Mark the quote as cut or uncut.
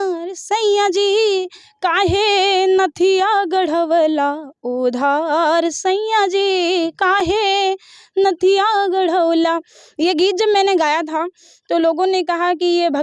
uncut